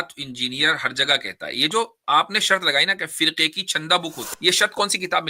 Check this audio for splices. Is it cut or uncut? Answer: cut